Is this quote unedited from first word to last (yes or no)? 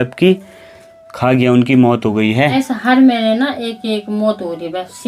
no